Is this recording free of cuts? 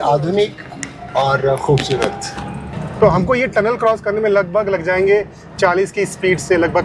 no; 1 cut; at 2.8 s

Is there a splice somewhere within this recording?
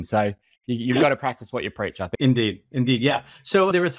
no; 0 cuts

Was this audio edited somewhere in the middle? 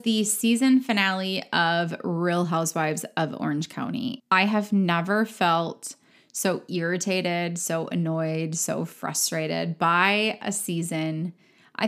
yes; 1 cut; at 4.2 s

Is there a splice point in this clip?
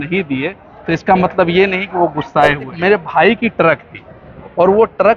yes; 1 cut; at 2.7 s

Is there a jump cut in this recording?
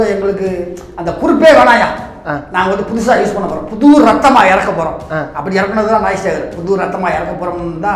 no; 0 cuts

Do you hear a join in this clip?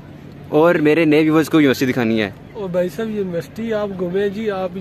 no; 0 cuts

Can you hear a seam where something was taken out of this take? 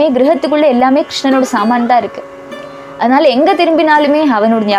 no; 0 cuts

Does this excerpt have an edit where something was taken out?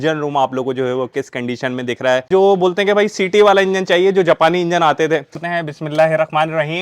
yes; 2 cuts; at 2.3 s, 5.5 s

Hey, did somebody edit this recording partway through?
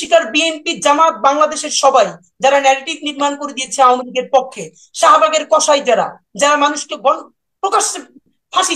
no; 0 cuts

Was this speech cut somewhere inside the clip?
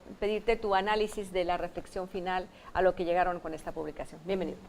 yes; 1 cut; at 2.7 s

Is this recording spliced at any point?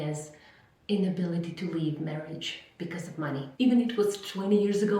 yes; 1 cut; at 3.5 s

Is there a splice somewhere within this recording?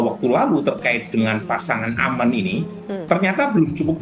no; 0 cuts

